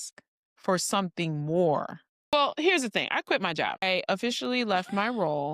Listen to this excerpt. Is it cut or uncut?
cut